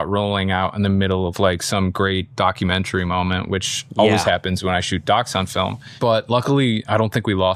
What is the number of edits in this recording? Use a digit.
0